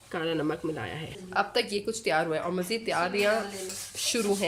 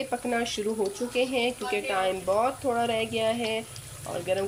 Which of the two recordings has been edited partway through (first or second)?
first